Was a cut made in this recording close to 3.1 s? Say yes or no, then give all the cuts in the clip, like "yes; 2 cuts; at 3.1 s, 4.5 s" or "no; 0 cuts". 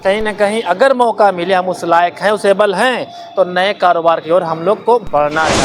no; 0 cuts